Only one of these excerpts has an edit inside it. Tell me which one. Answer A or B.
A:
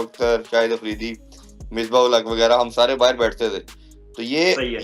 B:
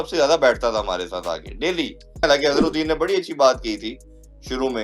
B